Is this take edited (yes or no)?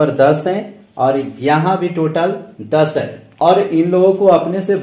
no